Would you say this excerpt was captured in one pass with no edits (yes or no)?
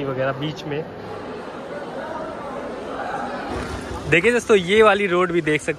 no